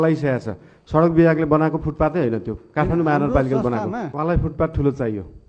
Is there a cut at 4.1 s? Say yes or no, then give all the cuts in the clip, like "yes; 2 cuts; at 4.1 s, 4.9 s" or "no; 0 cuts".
yes; 1 cut; at 4.1 s